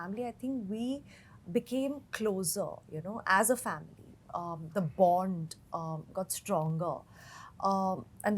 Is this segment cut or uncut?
uncut